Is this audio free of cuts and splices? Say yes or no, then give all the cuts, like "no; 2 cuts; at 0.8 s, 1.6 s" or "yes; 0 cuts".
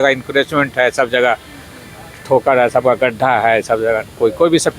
yes; 0 cuts